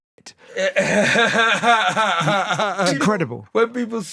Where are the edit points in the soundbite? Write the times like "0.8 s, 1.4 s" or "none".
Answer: 3.0 s